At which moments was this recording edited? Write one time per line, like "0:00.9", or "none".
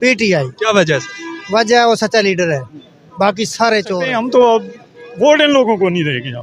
0:04.1